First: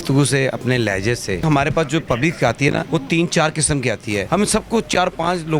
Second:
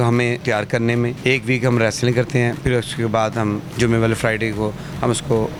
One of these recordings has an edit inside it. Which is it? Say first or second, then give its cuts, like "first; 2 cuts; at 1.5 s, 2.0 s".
first; 3 cuts; at 1.5 s, 2.9 s, 4.2 s